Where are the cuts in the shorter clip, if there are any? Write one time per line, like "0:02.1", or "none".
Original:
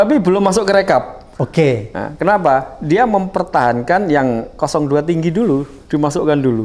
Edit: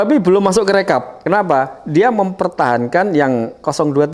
0:01.1